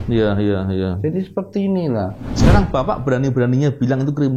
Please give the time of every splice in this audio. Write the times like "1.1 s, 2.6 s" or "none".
2.3 s